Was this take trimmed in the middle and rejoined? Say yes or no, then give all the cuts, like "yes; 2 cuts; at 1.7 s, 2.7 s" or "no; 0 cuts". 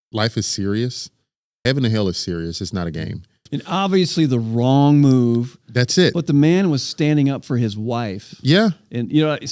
yes; 1 cut; at 3.4 s